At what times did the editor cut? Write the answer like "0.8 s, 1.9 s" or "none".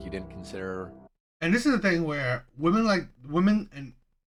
none